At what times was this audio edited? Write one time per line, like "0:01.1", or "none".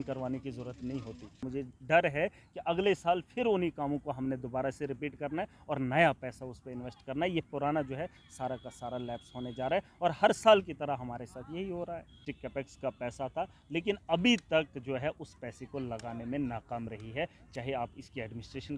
0:01.5
0:12.3